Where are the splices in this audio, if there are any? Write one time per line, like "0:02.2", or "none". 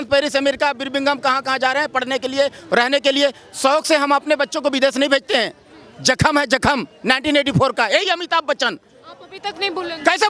none